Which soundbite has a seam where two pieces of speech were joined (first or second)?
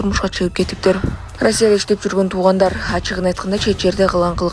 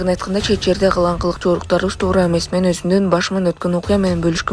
first